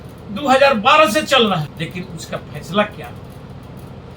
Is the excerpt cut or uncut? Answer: cut